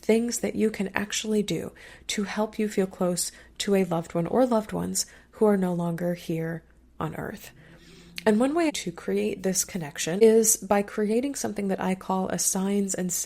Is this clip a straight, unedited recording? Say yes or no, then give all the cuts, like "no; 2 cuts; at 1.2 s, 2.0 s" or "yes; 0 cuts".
no; 2 cuts; at 8.7 s, 10.2 s